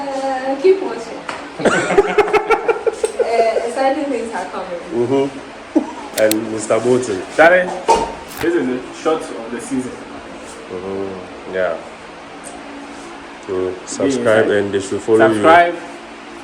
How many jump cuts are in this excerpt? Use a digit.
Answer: 2